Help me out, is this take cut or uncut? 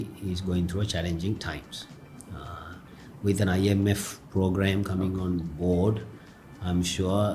uncut